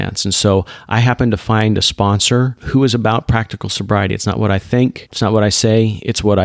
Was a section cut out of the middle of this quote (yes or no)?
yes